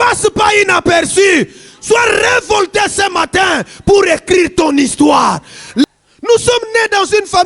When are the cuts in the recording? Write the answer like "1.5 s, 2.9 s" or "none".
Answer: 5.8 s